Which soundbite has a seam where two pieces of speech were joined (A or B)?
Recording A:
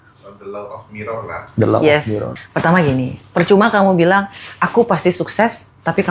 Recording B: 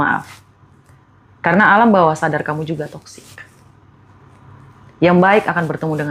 A